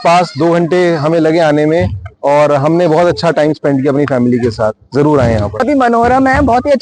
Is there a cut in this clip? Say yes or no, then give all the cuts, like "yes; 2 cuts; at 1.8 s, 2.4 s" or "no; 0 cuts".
yes; 1 cut; at 5.6 s